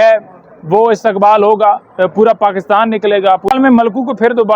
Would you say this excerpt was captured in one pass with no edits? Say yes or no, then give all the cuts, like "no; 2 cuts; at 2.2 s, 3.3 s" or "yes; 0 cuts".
no; 1 cut; at 3.5 s